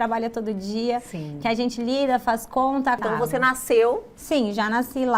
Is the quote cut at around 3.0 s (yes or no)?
yes